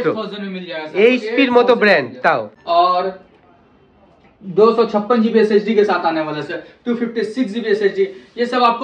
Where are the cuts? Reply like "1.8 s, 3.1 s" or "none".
2.6 s

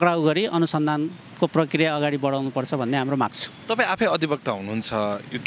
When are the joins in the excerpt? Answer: none

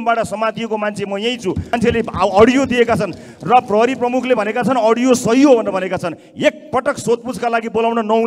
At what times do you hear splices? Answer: 1.7 s

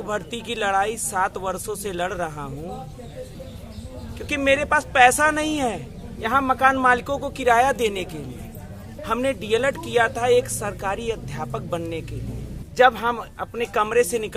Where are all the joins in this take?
3.4 s, 8.9 s, 12.6 s

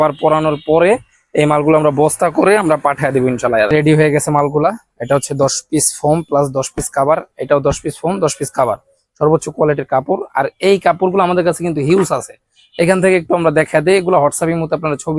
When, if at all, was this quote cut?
none

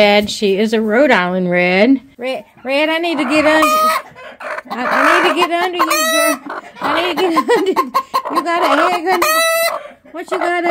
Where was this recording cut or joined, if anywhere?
2.1 s

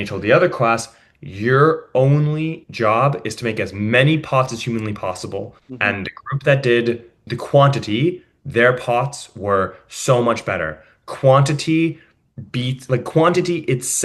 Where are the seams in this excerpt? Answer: 5.6 s, 7.3 s

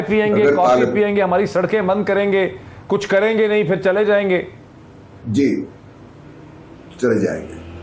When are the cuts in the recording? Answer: none

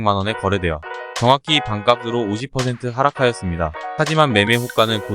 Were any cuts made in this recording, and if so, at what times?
3.8 s

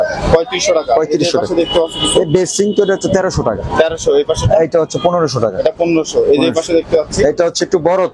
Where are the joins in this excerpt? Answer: none

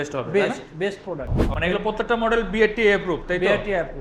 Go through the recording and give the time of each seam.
1.4 s

